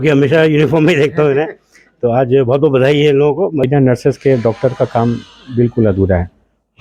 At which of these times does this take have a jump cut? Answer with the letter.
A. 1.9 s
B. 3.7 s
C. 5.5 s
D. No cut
B